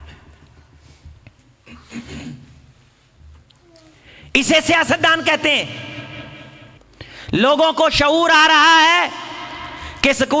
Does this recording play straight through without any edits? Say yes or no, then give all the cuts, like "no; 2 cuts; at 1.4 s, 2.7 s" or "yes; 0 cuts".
no; 1 cut; at 6.8 s